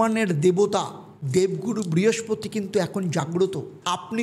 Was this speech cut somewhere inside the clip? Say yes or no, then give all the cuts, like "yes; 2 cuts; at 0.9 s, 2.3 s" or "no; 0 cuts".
no; 0 cuts